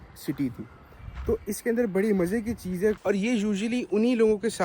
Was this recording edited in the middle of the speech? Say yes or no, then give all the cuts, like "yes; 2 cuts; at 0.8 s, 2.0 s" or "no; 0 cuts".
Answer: yes; 1 cut; at 3.0 s